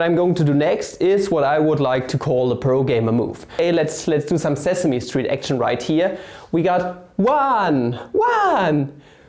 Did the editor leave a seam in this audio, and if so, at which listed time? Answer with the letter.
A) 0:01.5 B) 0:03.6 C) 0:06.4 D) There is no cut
B